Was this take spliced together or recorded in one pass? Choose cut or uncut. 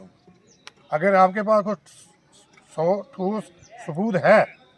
uncut